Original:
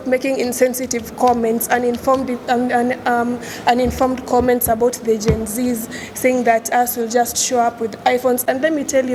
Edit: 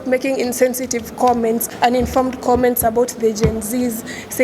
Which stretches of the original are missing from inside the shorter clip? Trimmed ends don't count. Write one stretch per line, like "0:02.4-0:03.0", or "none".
0:01.6-0:03.5